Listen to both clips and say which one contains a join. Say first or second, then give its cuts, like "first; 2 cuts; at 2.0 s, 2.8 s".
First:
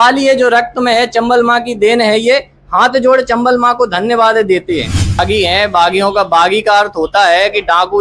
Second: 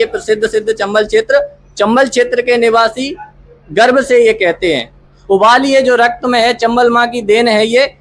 first; 1 cut; at 5.2 s